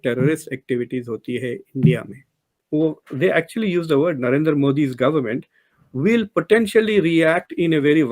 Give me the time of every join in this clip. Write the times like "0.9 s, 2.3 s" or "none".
2.5 s